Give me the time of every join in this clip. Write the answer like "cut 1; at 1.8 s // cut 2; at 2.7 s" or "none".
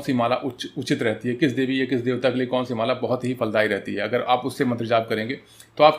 none